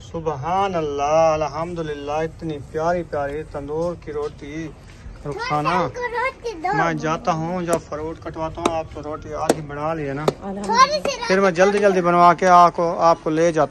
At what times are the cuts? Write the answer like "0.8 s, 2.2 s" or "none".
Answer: none